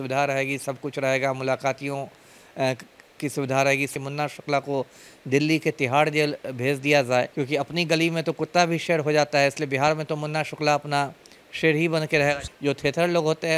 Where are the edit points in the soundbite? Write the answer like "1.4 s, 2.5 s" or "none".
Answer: 4.0 s, 7.3 s, 12.5 s

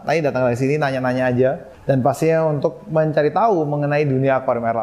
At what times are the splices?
1.7 s

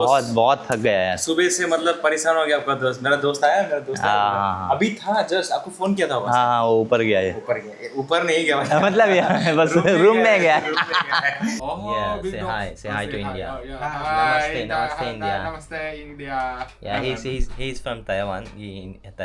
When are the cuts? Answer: 11.6 s

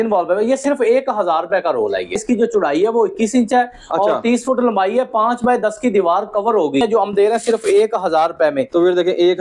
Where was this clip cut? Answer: 6.8 s

